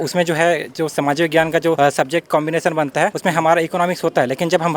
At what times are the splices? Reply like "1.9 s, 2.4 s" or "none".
1.8 s, 3.2 s